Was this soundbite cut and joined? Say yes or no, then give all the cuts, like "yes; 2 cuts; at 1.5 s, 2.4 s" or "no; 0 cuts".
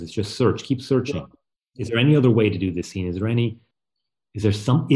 yes; 1 cut; at 3.7 s